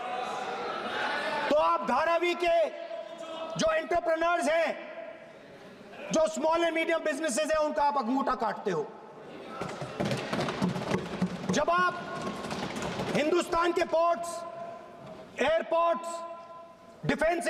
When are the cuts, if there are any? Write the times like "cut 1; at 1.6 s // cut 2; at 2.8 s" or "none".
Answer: none